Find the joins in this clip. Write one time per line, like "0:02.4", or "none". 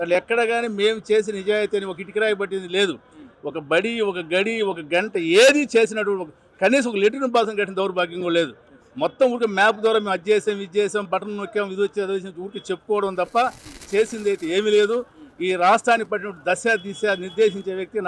none